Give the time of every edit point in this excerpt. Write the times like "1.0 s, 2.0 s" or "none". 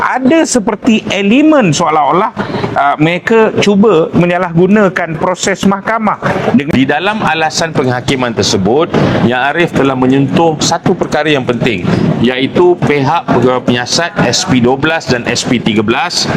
6.7 s